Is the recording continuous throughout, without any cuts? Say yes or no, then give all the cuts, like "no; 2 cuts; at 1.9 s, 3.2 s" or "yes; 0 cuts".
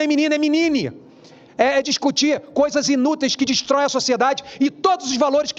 yes; 0 cuts